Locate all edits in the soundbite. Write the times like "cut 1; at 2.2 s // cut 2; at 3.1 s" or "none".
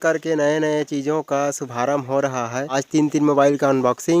cut 1; at 2.8 s